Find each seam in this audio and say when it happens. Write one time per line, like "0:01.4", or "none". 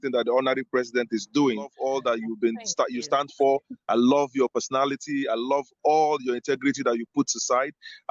0:01.8